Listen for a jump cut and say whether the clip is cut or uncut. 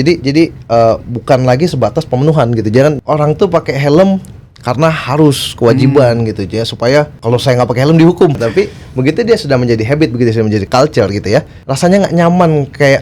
cut